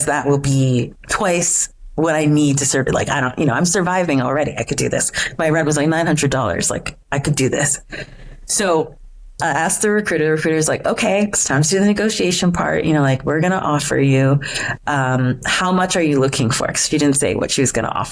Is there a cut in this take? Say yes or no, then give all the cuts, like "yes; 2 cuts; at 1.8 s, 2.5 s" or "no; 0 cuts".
no; 0 cuts